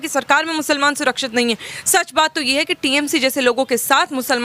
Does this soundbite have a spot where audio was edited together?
no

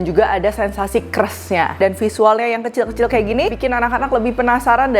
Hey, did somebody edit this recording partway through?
yes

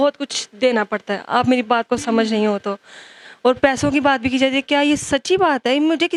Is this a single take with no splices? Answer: yes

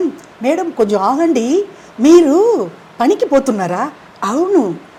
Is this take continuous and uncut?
yes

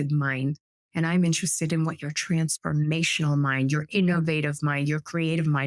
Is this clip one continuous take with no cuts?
yes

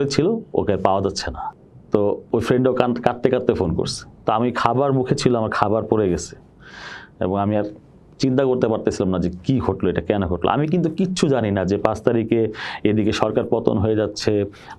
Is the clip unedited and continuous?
yes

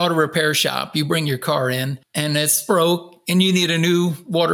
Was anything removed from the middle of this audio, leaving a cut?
yes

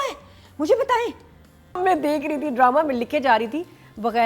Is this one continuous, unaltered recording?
no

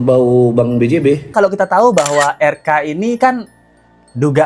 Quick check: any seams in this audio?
yes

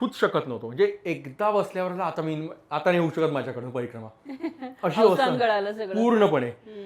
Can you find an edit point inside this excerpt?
no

